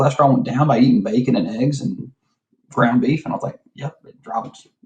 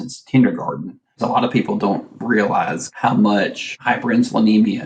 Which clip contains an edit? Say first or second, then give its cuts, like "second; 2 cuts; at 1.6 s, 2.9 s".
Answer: second; 3 cuts; at 1.1 s, 2.8 s, 3.7 s